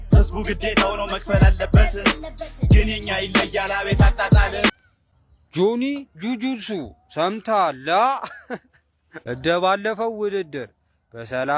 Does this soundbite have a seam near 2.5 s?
no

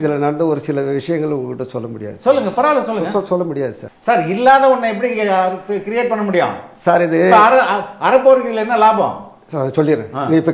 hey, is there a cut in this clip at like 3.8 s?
yes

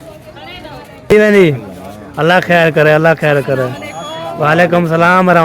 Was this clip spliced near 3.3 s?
no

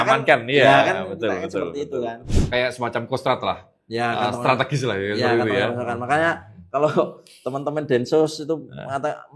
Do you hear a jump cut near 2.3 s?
yes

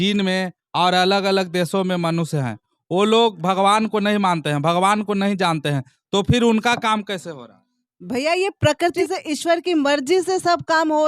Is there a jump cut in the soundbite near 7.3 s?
no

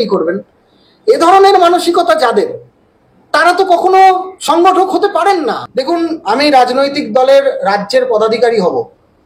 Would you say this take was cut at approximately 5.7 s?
yes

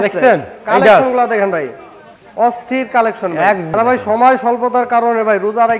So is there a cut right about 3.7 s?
yes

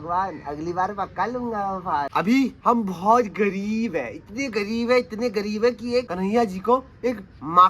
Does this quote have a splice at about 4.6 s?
no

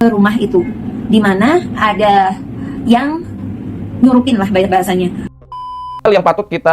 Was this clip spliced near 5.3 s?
yes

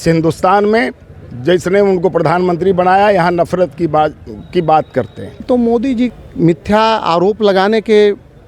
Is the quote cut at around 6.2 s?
yes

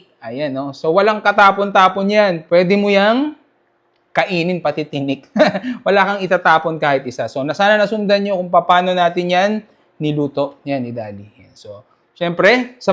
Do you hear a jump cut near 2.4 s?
no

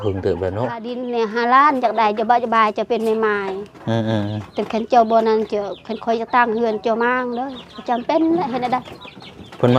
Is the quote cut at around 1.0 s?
yes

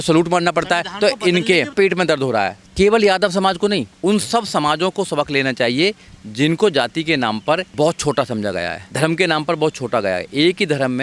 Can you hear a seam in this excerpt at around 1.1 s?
no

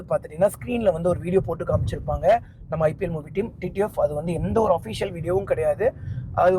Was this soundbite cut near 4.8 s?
no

